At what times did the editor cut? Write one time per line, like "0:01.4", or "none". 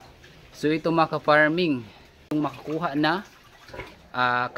0:02.3